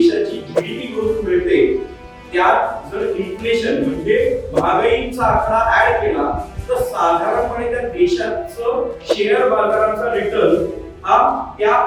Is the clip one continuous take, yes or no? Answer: yes